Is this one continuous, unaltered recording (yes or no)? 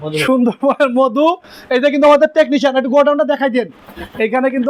yes